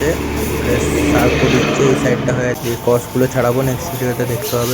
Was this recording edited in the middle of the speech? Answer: yes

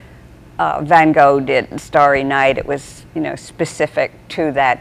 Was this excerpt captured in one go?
no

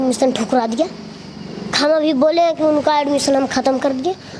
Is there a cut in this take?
no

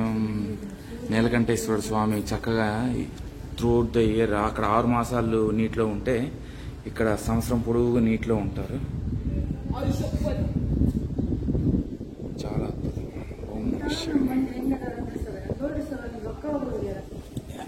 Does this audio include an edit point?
no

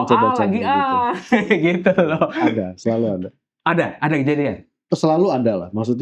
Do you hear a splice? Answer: no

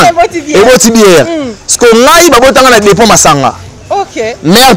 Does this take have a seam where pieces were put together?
no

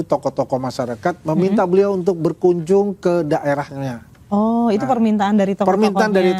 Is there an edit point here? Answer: no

